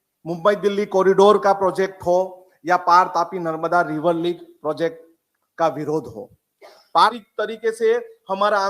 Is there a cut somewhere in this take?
yes; 1 cut; at 7.2 s

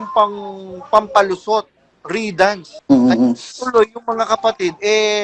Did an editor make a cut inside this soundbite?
yes; 1 cut; at 2.7 s

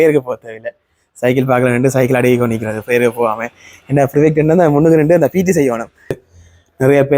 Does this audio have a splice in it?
yes; 1 cut; at 6.2 s

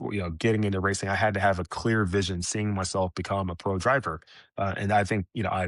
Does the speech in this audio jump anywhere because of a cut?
no; 0 cuts

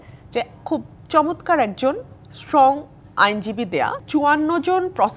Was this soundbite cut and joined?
yes; 1 cut; at 4.0 s

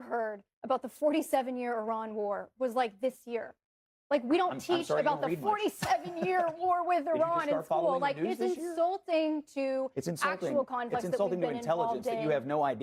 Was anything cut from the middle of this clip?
no; 0 cuts

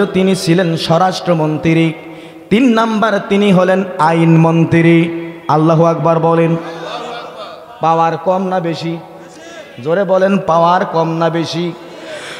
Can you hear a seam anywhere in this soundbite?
no; 0 cuts

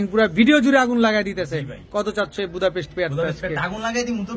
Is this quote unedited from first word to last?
yes; 0 cuts

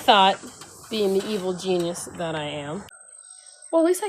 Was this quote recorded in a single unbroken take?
no; 1 cut; at 2.9 s

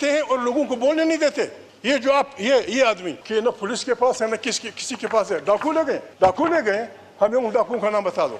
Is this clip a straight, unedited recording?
no; 3 cuts; at 1.7 s, 3.1 s, 6.1 s

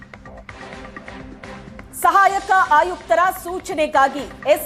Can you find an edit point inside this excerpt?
yes; 1 cut; at 1.8 s

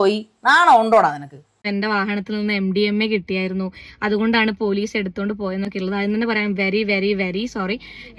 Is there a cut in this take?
yes; 1 cut; at 1.4 s

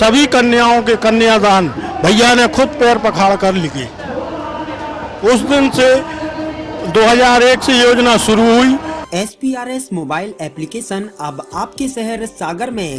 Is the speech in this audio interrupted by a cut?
yes; 1 cut; at 9.0 s

